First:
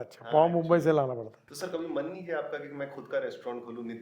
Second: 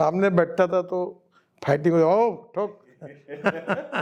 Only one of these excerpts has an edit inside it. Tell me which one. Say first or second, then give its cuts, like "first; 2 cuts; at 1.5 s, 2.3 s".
first; 1 cut; at 1.4 s